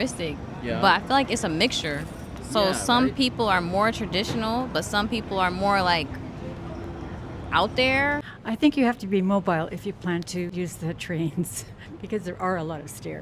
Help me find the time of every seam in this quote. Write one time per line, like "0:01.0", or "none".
0:08.2
0:10.5